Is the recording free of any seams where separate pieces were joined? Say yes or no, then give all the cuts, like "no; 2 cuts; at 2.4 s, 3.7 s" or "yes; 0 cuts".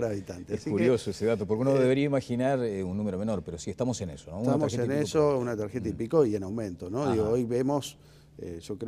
no; 1 cut; at 5.7 s